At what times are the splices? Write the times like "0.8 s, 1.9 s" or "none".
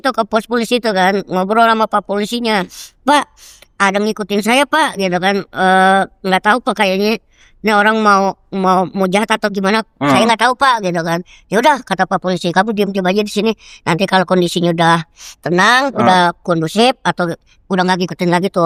none